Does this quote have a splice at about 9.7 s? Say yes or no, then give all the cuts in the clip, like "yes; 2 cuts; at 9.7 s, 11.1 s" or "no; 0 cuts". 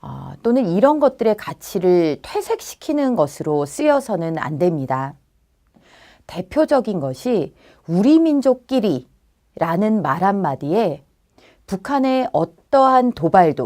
yes; 1 cut; at 9.7 s